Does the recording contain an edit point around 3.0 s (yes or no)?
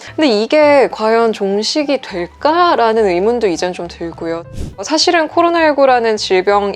no